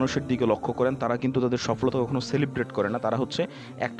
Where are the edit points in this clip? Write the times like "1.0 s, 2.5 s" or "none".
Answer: none